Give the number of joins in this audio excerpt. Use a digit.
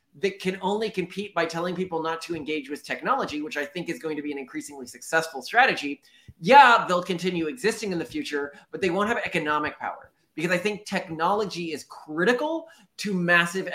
0